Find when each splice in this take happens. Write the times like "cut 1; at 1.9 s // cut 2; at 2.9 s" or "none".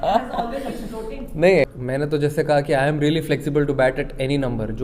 cut 1; at 1.8 s